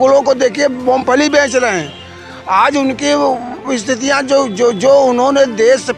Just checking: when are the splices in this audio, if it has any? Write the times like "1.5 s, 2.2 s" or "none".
none